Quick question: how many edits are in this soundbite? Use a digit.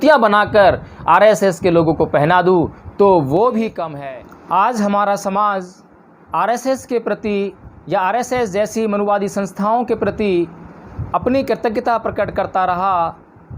2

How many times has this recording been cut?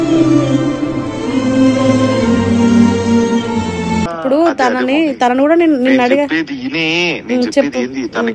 1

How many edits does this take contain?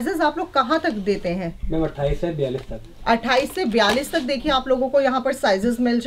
0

